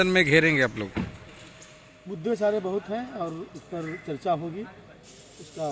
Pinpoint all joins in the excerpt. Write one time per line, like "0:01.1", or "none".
none